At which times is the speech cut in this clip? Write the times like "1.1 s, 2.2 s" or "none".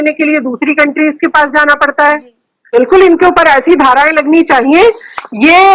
2.7 s